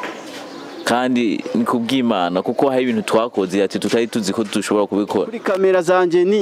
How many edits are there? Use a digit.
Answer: 1